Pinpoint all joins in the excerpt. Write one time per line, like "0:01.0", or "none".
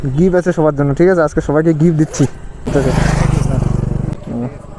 0:02.7
0:03.9